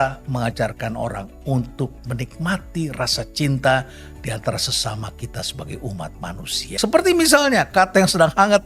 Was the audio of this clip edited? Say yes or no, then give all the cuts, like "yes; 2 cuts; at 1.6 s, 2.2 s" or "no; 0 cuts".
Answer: yes; 1 cut; at 6.6 s